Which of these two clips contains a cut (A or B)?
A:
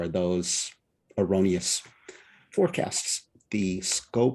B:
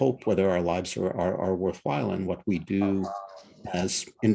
A